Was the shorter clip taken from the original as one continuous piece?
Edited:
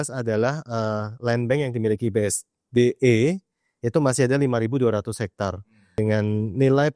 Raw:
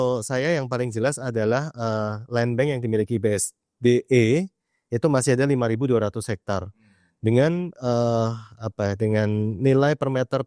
no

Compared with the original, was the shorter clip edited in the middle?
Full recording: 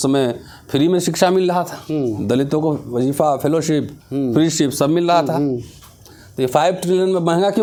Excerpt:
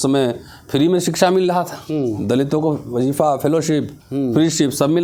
no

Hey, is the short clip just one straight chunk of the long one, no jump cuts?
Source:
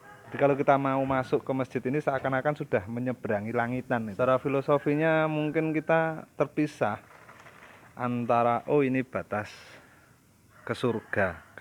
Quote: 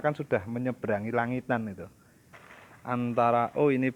no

